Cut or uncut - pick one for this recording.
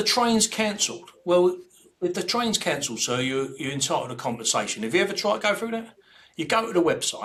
uncut